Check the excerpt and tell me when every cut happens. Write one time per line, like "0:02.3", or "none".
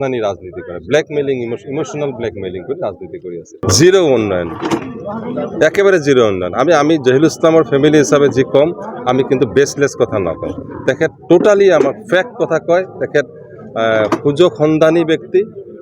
0:03.5

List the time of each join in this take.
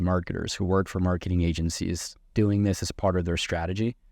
none

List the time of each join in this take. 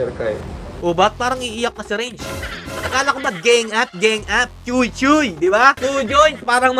0:05.8

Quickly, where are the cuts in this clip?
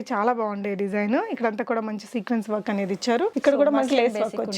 0:03.3

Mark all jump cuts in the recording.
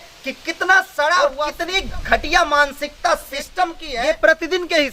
0:01.5
0:03.9

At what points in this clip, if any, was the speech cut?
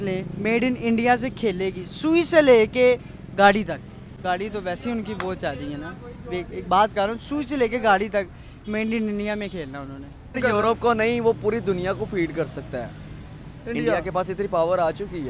none

